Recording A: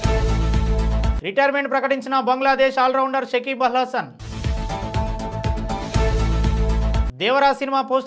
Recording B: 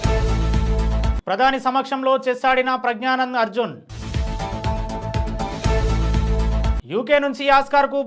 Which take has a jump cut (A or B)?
B